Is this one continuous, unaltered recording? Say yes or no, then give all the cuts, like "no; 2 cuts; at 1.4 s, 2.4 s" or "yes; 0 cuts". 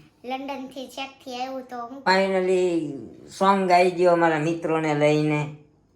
no; 1 cut; at 2.1 s